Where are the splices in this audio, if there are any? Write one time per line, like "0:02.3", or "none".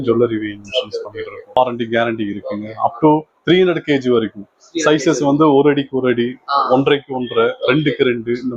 0:01.6